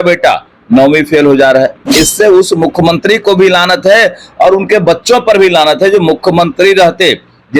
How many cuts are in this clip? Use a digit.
1